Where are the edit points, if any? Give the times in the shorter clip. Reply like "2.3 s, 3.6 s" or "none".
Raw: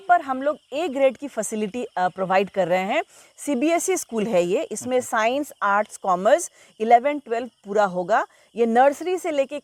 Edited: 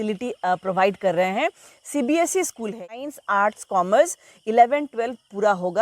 2.7 s